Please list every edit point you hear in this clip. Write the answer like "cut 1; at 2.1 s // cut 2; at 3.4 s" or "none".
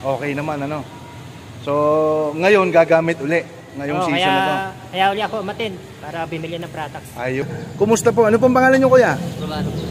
cut 1; at 7.4 s